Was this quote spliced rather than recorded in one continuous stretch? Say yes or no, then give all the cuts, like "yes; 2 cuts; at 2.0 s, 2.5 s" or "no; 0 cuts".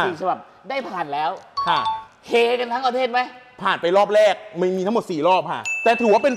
no; 0 cuts